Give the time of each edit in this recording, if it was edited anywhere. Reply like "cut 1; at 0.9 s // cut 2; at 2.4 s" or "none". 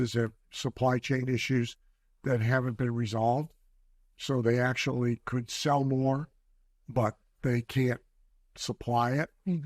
none